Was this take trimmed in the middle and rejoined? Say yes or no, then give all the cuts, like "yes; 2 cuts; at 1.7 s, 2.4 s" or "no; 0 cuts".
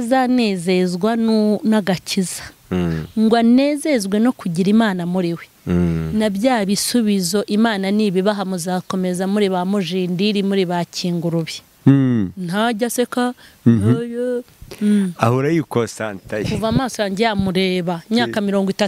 yes; 1 cut; at 11.6 s